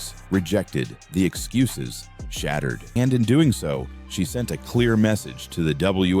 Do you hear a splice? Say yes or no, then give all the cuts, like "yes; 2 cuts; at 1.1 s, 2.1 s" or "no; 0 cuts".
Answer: yes; 1 cut; at 3.0 s